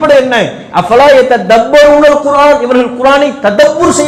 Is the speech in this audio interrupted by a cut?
no; 0 cuts

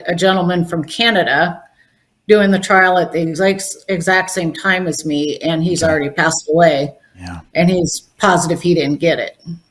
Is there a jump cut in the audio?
no; 0 cuts

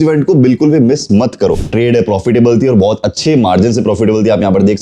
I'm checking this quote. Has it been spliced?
yes; 1 cut; at 1.7 s

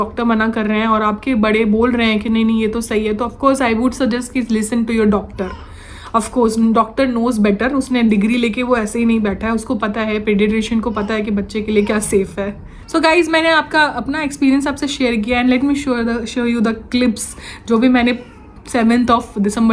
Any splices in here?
no; 0 cuts

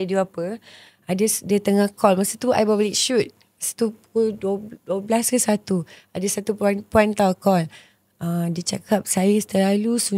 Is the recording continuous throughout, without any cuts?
yes; 0 cuts

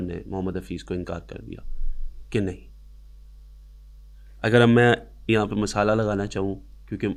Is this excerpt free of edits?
yes; 0 cuts

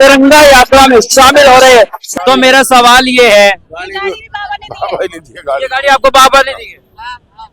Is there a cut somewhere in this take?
yes; 1 cut; at 2.0 s

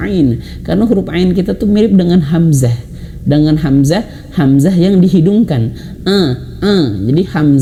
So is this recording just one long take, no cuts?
yes; 0 cuts

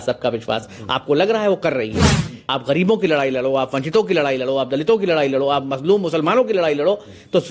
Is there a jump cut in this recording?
yes; 1 cut; at 2.4 s

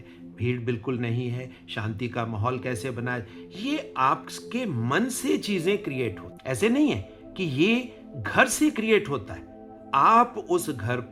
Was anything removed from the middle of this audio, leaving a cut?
yes; 1 cut; at 6.3 s

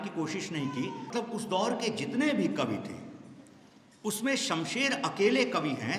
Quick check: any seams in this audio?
yes; 1 cut; at 1.0 s

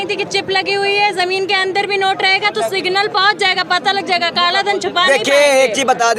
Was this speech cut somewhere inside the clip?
no; 0 cuts

